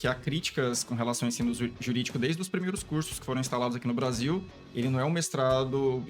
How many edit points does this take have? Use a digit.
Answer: 1